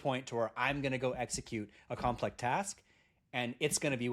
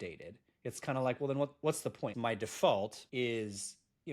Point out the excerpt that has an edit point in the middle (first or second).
second